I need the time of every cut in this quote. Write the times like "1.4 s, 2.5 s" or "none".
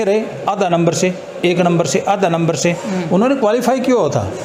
none